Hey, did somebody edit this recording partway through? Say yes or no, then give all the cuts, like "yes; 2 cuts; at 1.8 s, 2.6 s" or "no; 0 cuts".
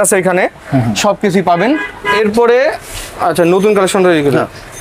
no; 0 cuts